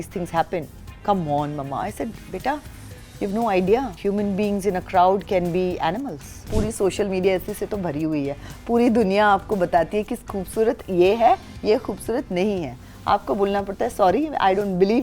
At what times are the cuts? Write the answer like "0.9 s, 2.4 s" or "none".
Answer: 3.9 s, 6.5 s